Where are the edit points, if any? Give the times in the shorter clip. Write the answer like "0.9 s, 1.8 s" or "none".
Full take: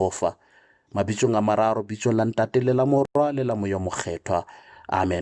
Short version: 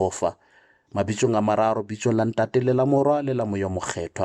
3.0 s